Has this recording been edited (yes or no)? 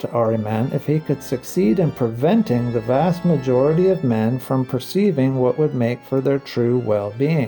no